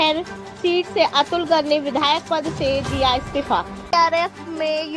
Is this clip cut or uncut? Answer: cut